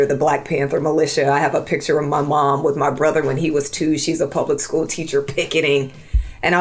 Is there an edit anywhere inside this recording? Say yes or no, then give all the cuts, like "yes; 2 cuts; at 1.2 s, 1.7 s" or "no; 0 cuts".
no; 0 cuts